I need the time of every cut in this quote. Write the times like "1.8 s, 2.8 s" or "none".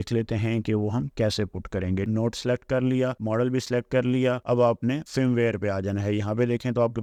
none